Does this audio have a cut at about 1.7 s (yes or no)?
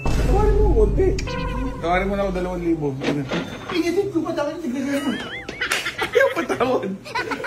yes